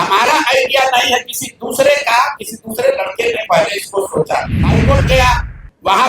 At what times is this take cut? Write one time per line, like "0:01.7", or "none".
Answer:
0:04.8